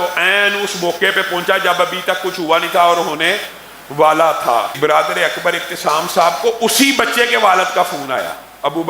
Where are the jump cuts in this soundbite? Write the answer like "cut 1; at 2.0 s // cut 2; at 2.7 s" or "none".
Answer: cut 1; at 4.7 s